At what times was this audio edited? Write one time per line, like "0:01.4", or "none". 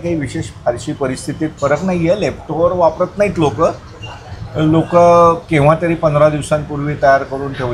none